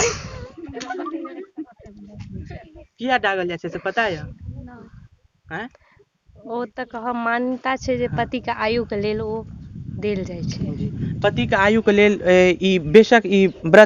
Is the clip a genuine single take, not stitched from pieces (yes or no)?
yes